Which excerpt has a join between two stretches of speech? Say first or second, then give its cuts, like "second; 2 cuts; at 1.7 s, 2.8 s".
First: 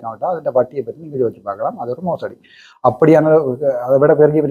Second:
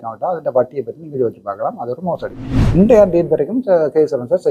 second; 1 cut; at 2.7 s